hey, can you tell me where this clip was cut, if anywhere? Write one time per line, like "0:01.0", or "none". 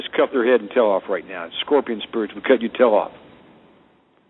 none